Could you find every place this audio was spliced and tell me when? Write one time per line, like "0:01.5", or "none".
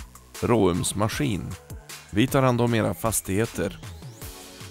0:03.7